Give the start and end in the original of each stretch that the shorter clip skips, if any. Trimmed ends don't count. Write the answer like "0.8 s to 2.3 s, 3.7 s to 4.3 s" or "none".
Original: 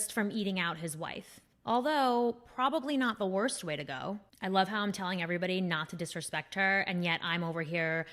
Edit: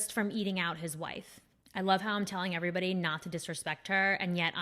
1.5 s to 4.2 s